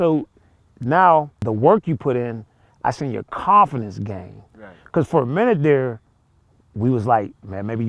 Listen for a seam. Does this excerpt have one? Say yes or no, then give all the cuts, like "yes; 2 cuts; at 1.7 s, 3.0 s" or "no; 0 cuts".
yes; 1 cut; at 1.4 s